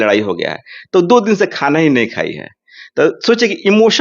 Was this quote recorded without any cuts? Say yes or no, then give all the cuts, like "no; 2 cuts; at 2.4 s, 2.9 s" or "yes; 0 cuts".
yes; 0 cuts